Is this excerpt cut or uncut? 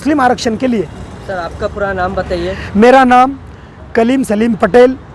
uncut